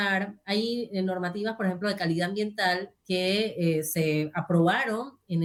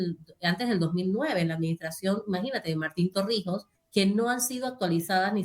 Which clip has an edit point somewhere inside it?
second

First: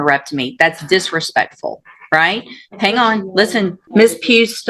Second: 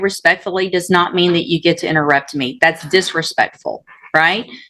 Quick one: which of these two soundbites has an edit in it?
first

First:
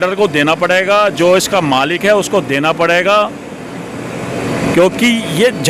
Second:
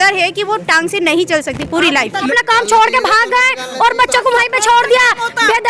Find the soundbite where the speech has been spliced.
second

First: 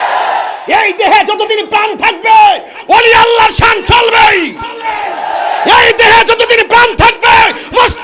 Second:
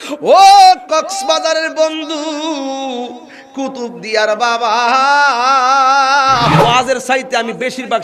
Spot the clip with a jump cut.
second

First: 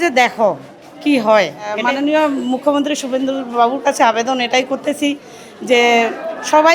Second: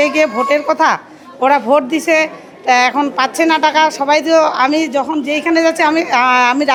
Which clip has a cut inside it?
first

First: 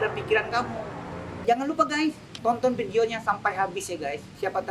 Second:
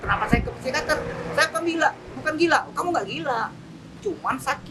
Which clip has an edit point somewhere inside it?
first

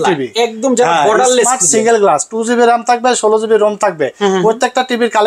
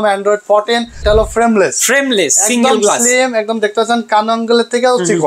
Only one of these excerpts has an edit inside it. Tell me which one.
second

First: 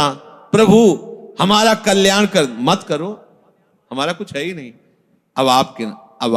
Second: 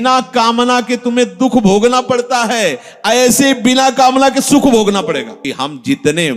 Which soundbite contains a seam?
second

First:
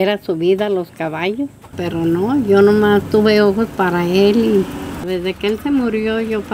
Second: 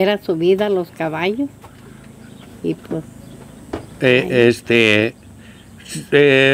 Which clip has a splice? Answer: first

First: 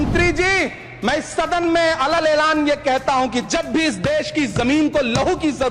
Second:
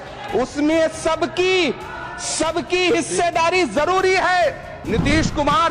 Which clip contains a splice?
second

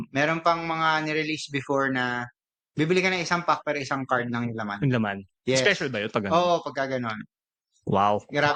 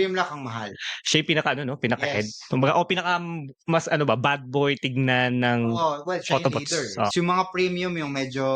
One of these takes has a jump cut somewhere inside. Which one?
second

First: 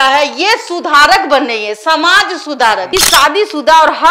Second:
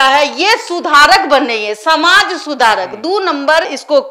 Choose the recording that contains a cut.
first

